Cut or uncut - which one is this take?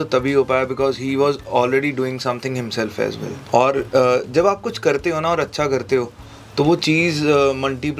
cut